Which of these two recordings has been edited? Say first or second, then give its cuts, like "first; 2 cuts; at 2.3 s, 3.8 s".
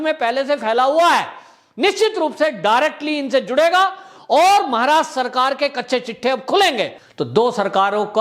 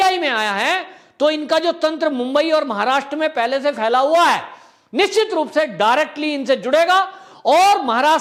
first; 1 cut; at 7.0 s